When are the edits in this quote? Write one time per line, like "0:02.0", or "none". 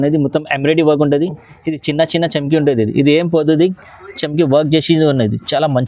none